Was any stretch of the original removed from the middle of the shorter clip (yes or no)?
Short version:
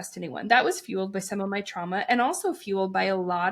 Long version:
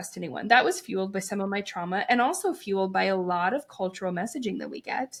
no